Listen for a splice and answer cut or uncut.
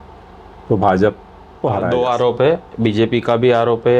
cut